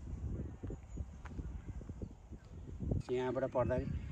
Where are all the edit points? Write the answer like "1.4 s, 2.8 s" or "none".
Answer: 3.0 s

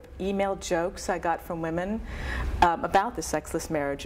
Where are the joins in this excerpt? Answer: 3.1 s

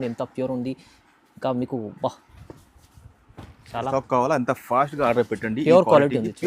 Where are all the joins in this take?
3.9 s

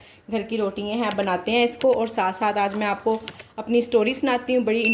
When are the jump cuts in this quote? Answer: none

